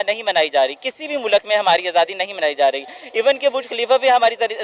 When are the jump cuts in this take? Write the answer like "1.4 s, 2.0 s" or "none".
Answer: none